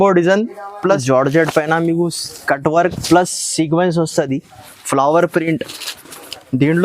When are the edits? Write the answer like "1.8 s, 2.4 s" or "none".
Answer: 1.0 s